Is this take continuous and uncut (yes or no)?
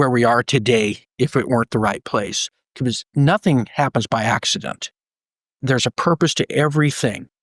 no